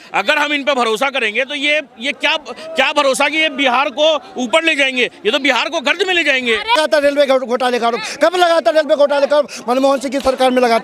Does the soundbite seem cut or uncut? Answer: cut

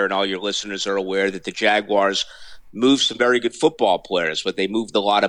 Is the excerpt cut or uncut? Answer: uncut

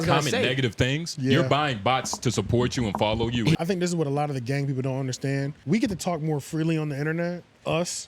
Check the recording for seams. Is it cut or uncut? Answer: cut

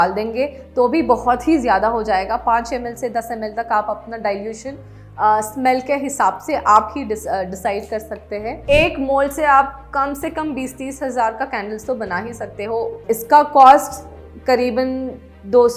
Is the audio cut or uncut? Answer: cut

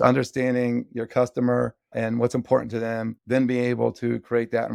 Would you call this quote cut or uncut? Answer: cut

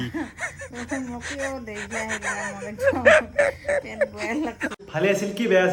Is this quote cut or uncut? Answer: cut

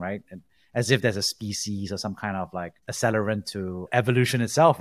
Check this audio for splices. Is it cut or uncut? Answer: cut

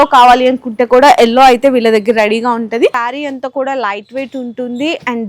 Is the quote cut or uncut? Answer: cut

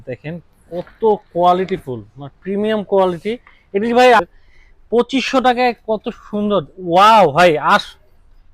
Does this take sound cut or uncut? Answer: cut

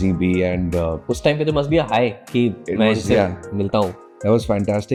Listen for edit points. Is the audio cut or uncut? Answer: uncut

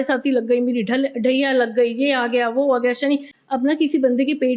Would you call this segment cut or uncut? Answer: cut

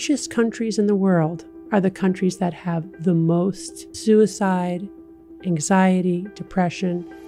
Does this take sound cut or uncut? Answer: uncut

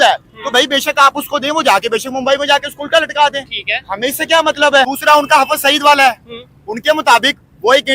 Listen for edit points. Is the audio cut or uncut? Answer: cut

